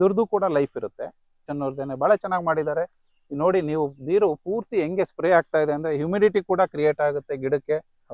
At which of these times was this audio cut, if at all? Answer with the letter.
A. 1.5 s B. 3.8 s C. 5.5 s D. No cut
A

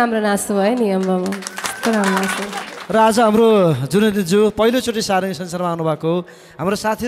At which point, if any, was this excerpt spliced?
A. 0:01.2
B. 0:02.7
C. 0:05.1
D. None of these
D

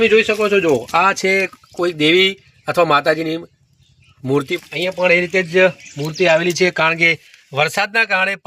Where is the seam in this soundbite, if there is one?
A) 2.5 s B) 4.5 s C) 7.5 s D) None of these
B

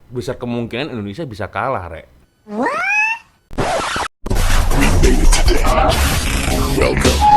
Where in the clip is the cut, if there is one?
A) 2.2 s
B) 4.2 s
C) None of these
B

